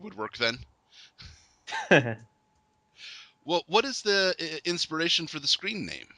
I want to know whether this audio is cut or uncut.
cut